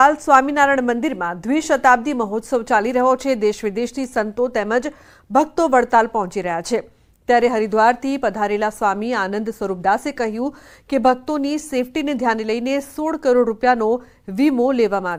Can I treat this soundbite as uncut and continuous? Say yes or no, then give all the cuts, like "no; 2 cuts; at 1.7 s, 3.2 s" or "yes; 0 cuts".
yes; 0 cuts